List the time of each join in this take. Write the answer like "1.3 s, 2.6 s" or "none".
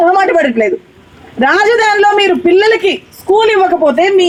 none